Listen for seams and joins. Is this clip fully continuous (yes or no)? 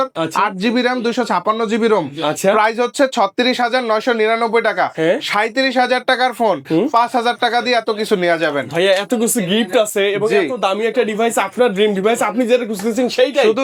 yes